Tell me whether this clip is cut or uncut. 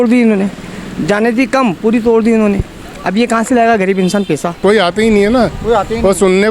cut